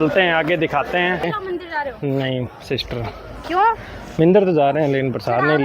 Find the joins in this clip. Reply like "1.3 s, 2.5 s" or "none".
1.2 s

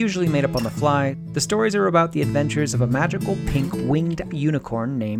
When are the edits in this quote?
1.2 s

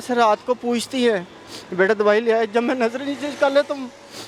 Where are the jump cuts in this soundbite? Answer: none

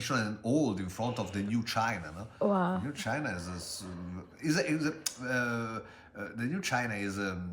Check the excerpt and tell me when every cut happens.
none

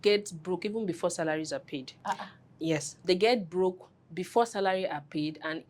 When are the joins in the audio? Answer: 1.9 s, 3.0 s

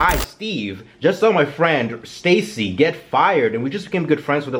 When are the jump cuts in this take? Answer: none

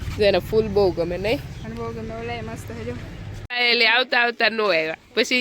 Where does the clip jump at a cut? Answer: 3.3 s

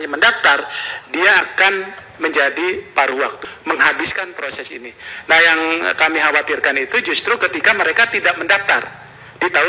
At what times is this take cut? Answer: 3.5 s

